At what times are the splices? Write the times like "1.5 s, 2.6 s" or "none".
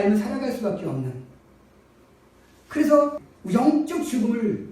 3.2 s